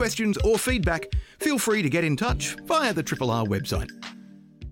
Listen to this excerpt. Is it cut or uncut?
cut